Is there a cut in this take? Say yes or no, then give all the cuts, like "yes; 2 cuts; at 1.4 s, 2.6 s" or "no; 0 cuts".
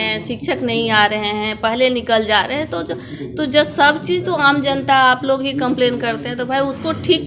no; 0 cuts